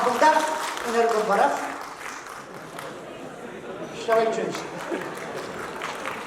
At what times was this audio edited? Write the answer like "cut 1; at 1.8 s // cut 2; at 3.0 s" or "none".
none